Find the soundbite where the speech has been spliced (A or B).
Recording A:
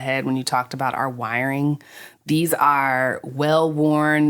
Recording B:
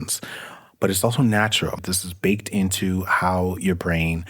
B